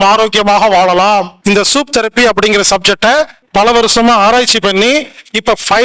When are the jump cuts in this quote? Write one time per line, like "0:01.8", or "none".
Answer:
0:01.3
0:03.4